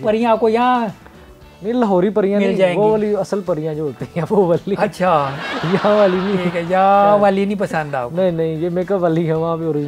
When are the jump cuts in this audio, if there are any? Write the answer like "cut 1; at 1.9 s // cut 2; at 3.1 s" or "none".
none